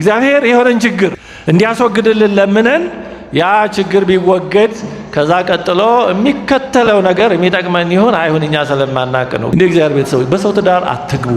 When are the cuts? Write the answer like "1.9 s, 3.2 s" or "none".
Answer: 1.3 s, 9.5 s

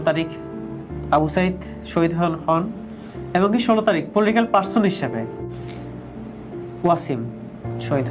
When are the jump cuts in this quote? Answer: none

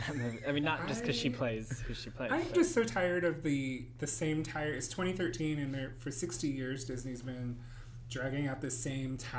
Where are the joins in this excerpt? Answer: 4.4 s

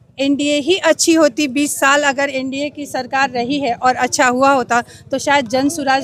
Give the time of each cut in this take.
none

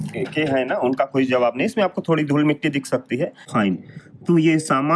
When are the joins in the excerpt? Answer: 3.5 s

